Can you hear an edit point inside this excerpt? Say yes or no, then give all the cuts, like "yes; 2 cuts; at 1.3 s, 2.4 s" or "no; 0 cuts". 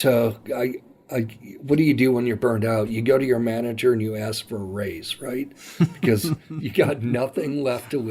no; 0 cuts